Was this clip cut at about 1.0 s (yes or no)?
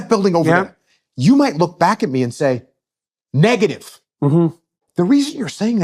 no